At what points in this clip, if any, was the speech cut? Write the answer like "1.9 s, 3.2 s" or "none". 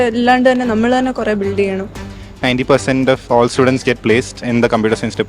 2.1 s